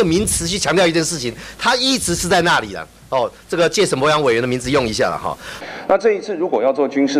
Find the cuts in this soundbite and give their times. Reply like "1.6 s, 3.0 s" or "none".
5.6 s